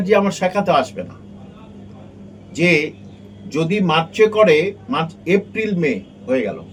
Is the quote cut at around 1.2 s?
no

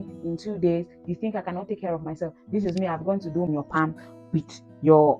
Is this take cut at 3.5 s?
yes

